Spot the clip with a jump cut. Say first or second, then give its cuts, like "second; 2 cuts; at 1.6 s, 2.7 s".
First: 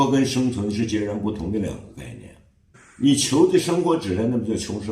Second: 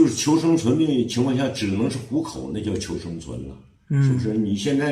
first; 1 cut; at 2.7 s